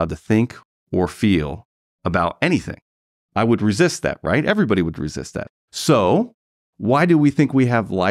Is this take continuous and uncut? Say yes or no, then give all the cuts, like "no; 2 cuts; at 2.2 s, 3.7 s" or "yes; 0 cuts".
no; 1 cut; at 5.5 s